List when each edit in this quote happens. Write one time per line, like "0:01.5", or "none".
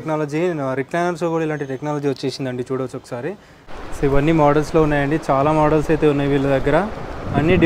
0:03.6